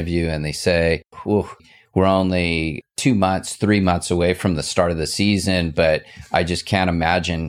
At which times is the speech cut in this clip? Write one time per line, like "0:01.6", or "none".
0:01.4
0:02.7